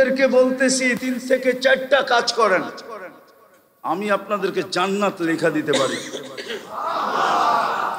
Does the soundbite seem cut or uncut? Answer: cut